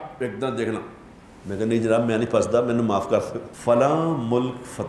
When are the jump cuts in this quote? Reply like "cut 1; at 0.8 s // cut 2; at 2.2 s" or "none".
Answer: cut 1; at 3.4 s